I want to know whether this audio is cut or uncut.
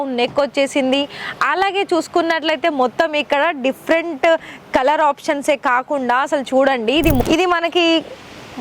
cut